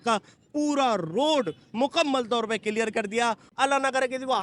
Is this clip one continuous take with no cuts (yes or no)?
no